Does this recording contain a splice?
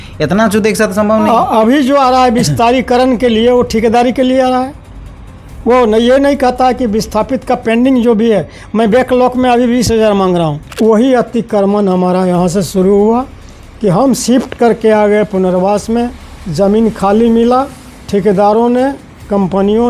yes; 1 cut; at 10.6 s

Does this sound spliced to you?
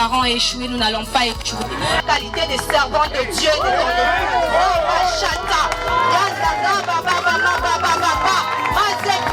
no; 0 cuts

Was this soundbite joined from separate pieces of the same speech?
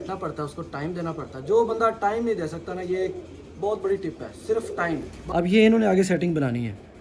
yes; 1 cut; at 5.0 s

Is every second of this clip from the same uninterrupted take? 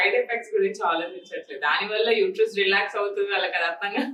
yes; 0 cuts

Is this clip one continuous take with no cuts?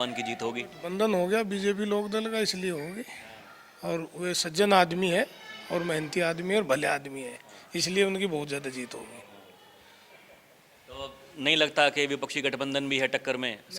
yes; 0 cuts

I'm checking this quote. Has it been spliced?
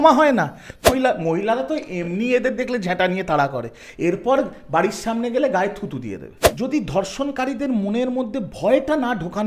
yes; 2 cuts; at 0.9 s, 6.4 s

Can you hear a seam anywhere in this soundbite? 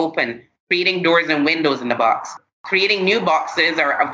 no; 0 cuts

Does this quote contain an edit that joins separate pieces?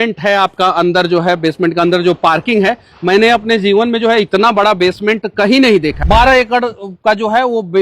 yes; 1 cut; at 6.0 s

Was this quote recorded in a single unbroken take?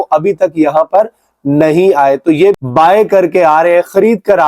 no; 1 cut; at 2.6 s

